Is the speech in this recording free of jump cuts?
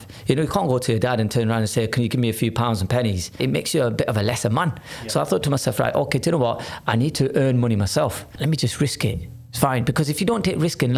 no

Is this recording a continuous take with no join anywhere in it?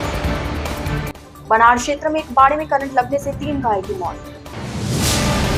no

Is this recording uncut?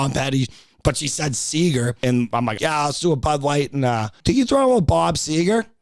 no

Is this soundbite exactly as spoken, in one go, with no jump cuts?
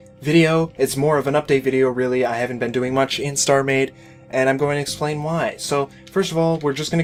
yes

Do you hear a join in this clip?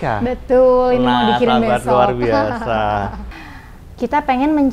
yes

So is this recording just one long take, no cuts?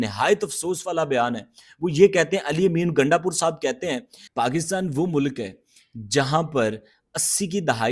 no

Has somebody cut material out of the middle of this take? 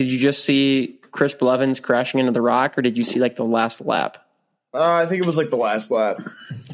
no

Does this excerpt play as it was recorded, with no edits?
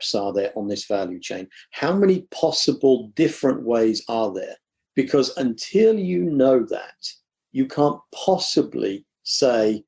no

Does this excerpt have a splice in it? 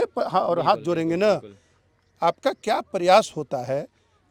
no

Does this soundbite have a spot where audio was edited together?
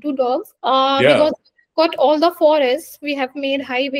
no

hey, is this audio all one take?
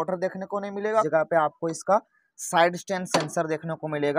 no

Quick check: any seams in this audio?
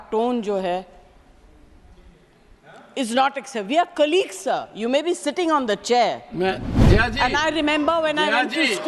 no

